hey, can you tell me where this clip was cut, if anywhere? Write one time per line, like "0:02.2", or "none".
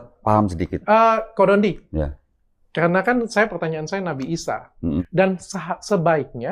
0:05.0